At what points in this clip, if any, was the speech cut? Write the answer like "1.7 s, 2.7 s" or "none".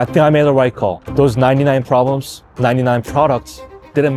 none

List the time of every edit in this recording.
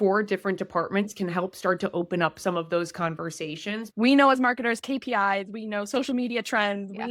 3.8 s

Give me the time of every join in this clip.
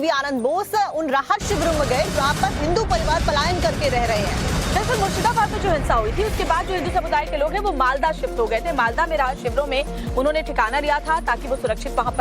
5.2 s

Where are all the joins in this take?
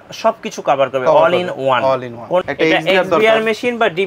2.4 s

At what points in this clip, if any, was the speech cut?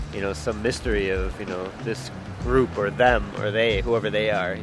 none

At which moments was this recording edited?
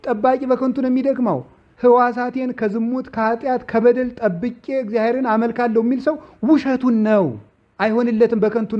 1.7 s

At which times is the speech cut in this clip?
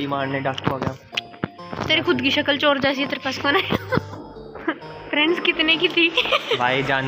4.6 s

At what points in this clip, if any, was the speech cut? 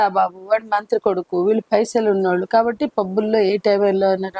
none

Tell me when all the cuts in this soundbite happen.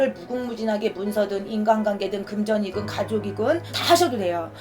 3.7 s

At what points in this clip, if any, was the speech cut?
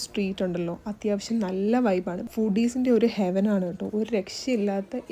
2.2 s

